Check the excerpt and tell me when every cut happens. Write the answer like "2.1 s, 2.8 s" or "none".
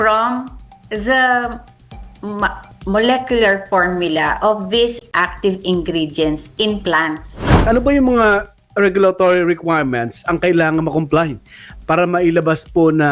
7.6 s

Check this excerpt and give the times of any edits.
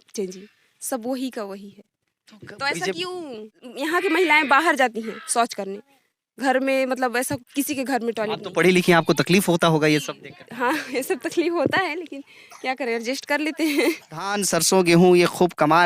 3.6 s, 14.4 s

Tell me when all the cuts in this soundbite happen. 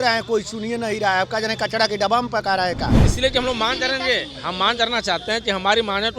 3.0 s

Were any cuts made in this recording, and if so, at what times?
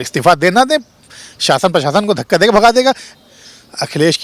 3.1 s

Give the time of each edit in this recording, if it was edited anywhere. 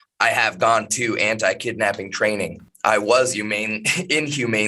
2.7 s

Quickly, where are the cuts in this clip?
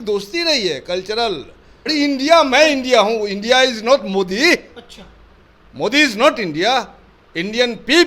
1.9 s

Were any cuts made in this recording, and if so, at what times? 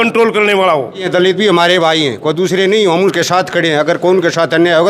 1.1 s

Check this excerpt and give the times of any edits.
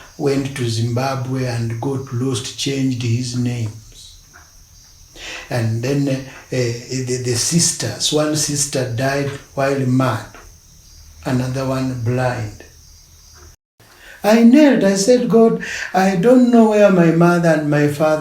13.7 s

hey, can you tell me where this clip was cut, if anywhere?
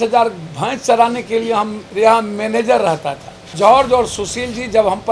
1.8 s, 3.5 s

